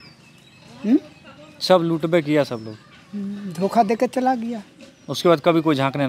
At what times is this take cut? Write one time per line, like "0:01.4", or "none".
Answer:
none